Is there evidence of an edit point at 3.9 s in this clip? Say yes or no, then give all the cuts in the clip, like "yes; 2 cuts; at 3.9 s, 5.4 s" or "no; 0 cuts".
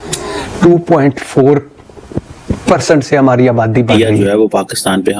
yes; 1 cut; at 3.9 s